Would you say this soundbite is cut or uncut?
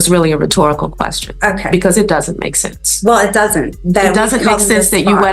uncut